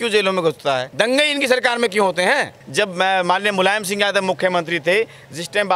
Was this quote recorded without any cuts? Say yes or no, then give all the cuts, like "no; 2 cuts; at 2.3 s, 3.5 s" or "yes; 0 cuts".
no; 2 cuts; at 0.9 s, 2.6 s